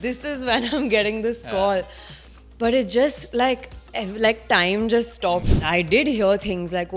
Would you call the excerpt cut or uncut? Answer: cut